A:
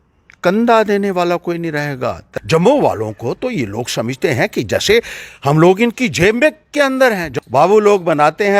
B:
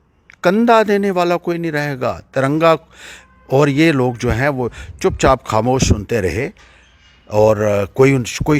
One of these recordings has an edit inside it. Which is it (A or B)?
A